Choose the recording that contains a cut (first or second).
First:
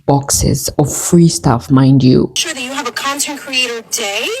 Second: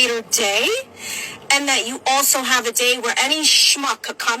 first